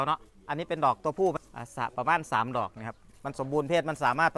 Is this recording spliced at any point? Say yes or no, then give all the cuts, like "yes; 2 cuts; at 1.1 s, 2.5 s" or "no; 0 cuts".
yes; 1 cut; at 1.4 s